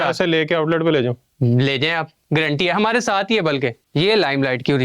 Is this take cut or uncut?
cut